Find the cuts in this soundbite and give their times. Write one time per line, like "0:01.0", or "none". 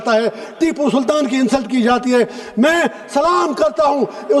none